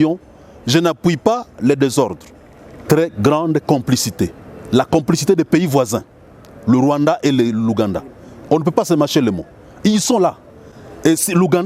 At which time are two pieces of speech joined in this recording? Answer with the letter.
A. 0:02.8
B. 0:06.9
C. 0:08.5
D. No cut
A